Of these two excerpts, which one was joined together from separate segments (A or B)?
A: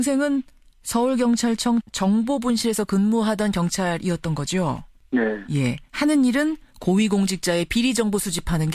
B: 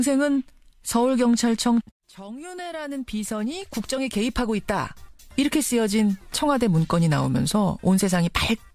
A